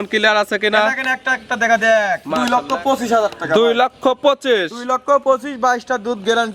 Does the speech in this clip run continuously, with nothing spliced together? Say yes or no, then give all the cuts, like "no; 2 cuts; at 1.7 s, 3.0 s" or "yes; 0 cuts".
no; 1 cut; at 2.3 s